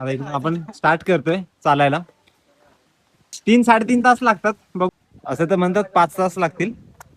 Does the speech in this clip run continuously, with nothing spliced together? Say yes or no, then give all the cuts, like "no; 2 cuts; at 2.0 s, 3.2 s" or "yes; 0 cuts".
no; 1 cut; at 4.9 s